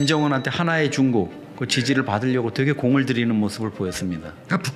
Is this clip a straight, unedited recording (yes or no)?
yes